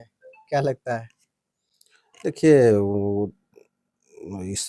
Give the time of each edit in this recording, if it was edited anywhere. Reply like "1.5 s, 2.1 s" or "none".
none

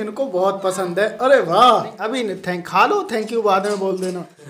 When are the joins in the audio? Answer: 2.0 s

